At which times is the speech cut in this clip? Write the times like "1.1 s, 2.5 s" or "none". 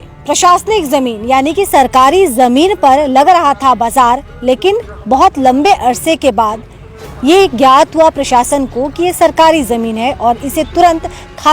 none